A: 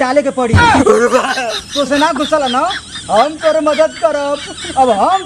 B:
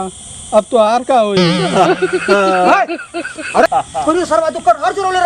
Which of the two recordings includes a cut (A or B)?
B